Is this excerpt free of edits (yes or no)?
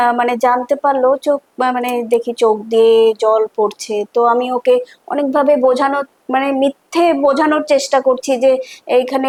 yes